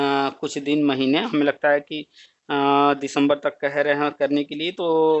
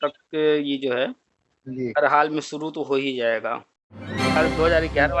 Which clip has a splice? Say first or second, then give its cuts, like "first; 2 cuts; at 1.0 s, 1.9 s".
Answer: second; 1 cut; at 4.3 s